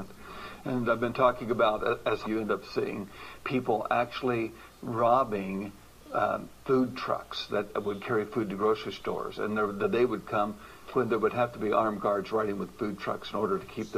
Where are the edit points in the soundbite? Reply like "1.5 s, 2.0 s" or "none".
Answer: none